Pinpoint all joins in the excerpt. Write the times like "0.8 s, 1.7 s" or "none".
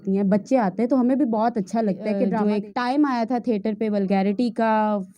2.3 s